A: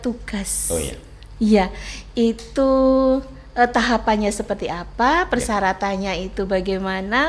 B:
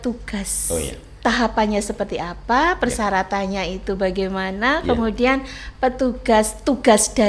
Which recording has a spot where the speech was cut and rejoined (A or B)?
B